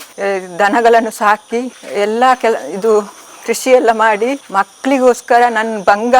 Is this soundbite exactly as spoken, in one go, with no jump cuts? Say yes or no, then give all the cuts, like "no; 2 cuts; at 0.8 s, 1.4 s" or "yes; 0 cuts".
no; 1 cut; at 4.4 s